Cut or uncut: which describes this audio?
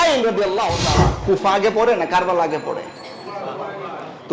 cut